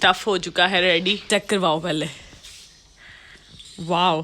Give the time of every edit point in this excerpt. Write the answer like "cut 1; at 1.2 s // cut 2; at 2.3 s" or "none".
cut 1; at 1.3 s

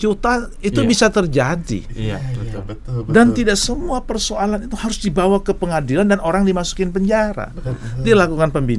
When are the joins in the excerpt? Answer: none

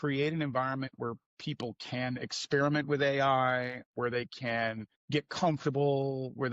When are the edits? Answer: cut 1; at 3.8 s // cut 2; at 4.9 s

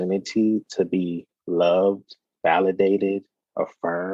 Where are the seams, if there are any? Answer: none

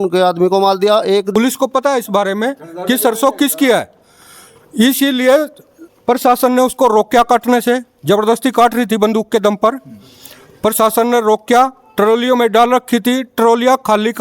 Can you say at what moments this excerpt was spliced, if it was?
cut 1; at 1.3 s

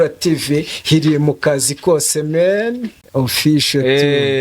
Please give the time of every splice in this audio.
cut 1; at 2.9 s

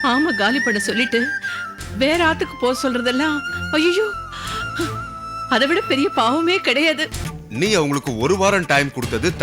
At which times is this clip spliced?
cut 1; at 7.2 s

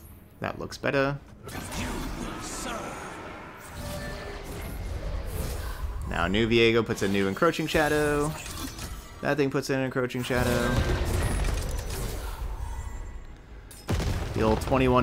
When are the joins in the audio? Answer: cut 1; at 1.3 s

